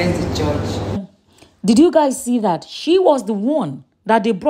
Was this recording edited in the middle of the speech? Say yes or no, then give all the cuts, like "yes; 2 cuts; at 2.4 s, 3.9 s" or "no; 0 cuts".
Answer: yes; 1 cut; at 1.1 s